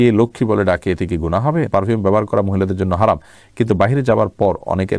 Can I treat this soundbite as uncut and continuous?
no; 1 cut; at 1.7 s

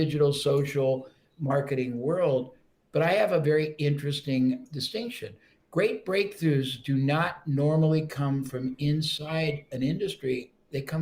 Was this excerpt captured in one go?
yes; 0 cuts

